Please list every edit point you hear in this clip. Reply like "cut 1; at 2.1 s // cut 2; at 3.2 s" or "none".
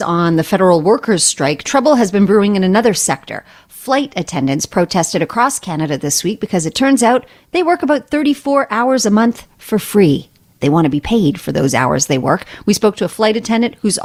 none